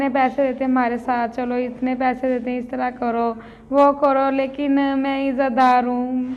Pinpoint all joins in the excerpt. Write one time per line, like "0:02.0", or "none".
none